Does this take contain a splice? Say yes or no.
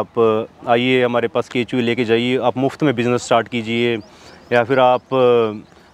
no